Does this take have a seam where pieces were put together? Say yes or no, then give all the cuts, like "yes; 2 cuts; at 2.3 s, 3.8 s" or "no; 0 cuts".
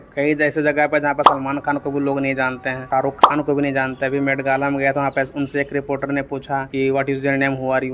no; 0 cuts